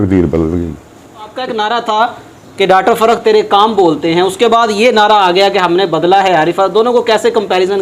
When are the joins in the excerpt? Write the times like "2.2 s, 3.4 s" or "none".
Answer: 1.4 s